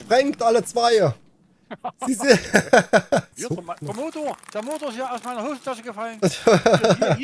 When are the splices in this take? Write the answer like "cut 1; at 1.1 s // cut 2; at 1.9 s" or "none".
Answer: cut 1; at 3.3 s